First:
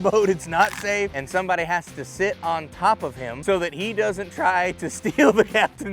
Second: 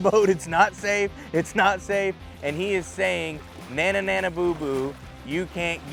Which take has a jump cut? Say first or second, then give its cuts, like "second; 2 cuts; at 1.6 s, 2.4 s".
first; 2 cuts; at 1.2 s, 3.3 s